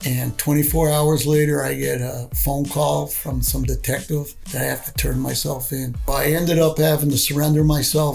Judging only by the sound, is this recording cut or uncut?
cut